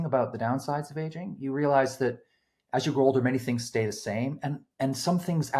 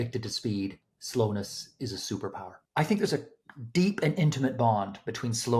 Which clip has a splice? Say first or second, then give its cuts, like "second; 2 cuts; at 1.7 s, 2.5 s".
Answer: second; 1 cut; at 2.6 s